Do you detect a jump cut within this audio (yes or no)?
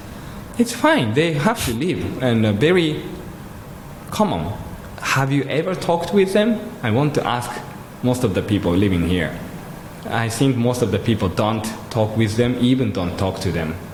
no